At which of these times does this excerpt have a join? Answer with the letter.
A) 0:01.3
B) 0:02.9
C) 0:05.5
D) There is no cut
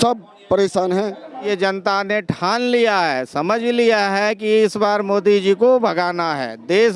A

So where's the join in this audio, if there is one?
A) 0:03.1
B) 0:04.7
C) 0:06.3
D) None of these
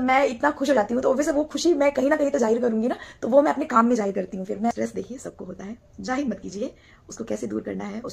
B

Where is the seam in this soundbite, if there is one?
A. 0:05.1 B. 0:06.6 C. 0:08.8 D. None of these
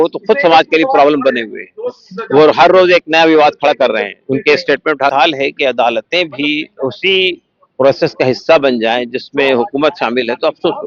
A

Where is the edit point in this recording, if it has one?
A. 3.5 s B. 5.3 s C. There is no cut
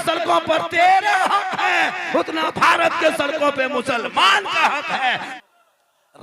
B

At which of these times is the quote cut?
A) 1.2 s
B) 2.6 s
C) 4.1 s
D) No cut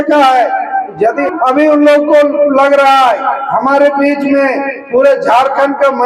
A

